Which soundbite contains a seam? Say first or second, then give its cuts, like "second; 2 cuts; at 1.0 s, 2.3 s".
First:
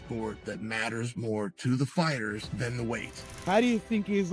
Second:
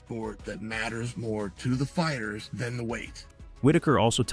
first; 1 cut; at 3.4 s